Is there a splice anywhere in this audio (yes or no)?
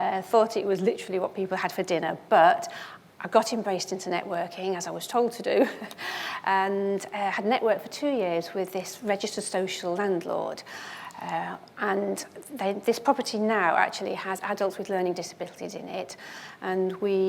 no